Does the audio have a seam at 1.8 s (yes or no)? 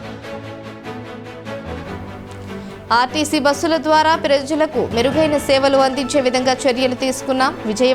yes